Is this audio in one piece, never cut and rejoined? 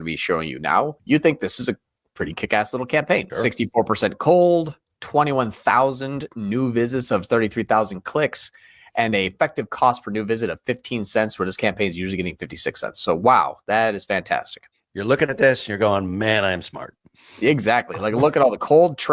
no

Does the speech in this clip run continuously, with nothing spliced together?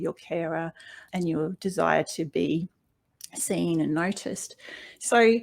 no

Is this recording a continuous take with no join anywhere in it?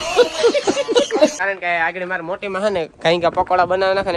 no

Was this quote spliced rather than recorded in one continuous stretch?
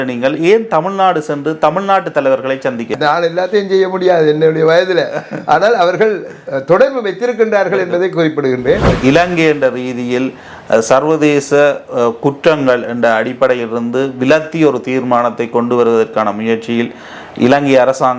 yes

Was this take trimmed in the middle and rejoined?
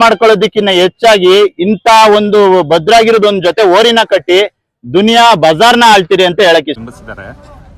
yes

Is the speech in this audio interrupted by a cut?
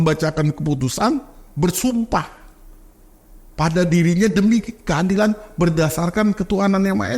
no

